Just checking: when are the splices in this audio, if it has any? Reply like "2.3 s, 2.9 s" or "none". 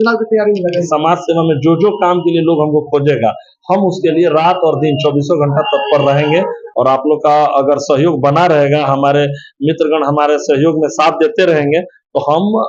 0.9 s, 6.6 s